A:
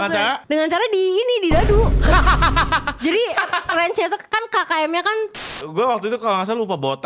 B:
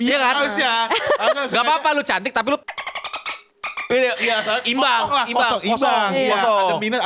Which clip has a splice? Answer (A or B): A